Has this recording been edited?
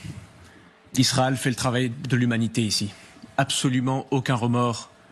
no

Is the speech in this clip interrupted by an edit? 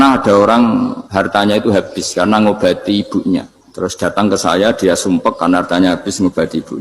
yes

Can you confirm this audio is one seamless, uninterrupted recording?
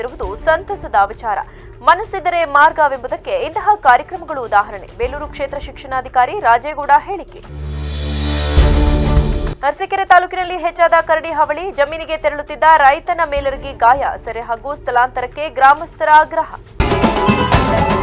no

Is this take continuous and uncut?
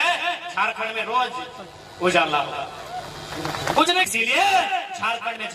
no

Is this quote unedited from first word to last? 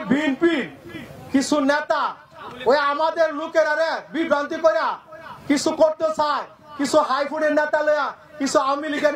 yes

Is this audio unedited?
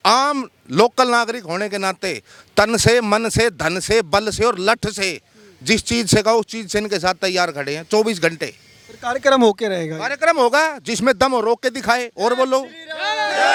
yes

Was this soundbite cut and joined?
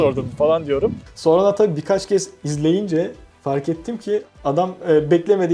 yes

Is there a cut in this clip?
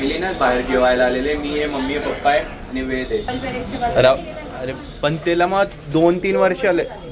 yes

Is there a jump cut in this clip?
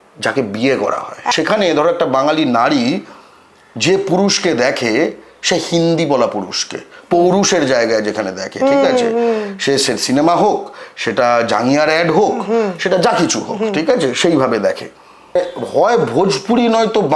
yes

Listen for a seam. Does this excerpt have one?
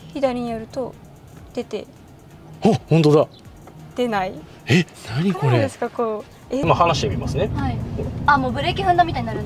yes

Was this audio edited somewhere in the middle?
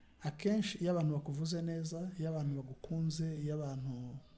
no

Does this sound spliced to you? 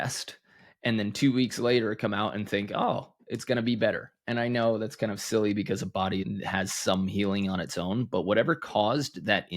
yes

